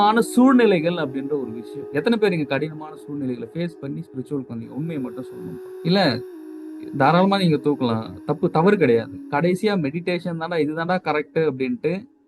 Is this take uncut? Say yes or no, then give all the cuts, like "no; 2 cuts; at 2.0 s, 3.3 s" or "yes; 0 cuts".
no; 1 cut; at 9.2 s